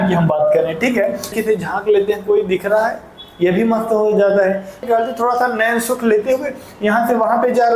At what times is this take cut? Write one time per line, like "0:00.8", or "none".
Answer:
0:01.3
0:04.9

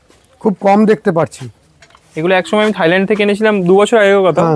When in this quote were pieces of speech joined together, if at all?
none

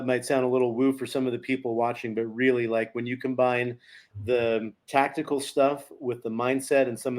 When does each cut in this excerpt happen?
0:04.8

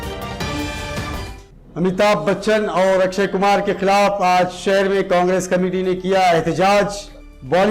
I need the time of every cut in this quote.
0:01.1

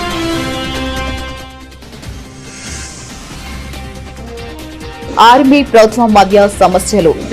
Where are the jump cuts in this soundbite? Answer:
0:02.8

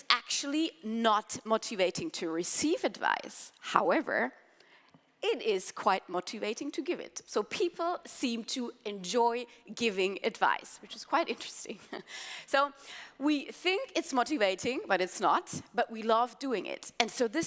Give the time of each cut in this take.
none

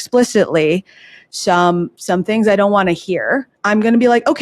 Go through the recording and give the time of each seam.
0:03.5

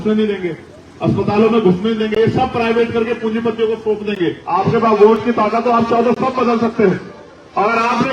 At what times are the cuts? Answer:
0:04.4

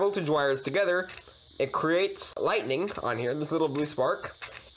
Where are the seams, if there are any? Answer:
0:02.3

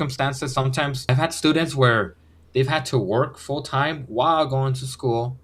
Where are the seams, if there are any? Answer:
0:01.1

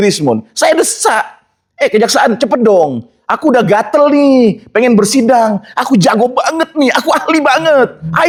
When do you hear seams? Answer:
none

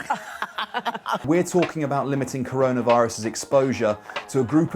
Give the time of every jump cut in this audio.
0:01.2

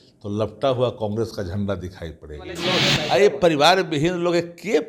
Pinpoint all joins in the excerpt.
0:02.6

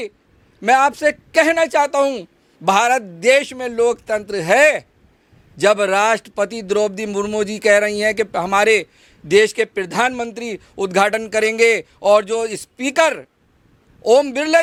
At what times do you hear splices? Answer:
none

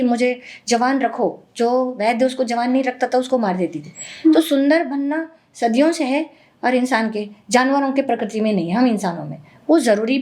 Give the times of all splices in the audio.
none

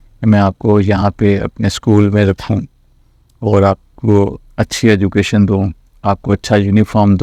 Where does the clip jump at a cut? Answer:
none

